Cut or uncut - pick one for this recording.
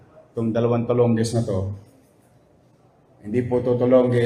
uncut